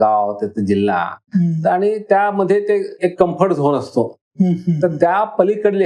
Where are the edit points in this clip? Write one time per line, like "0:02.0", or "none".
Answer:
none